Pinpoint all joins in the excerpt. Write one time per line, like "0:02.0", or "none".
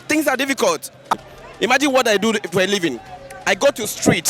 0:01.1